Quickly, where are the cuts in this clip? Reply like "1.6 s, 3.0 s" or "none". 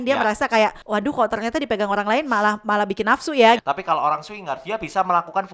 0.8 s, 3.6 s